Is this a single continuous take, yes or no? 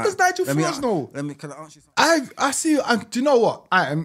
no